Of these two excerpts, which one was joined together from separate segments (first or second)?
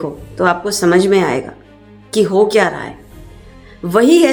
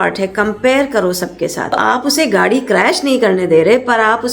second